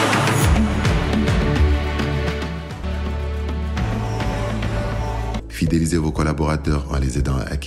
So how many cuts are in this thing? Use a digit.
1